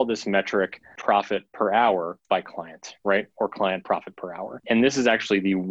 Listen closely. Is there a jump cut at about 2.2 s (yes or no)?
yes